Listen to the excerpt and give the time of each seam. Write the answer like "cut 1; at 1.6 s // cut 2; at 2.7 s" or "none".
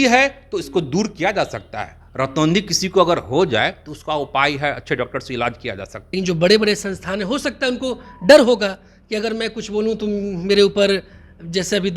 cut 1; at 6.0 s